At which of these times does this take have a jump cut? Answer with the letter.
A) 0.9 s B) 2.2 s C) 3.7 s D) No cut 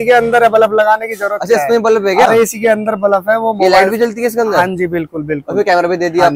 D